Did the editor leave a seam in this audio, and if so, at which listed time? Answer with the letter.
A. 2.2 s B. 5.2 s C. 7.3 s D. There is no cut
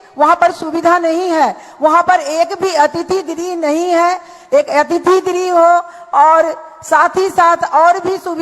D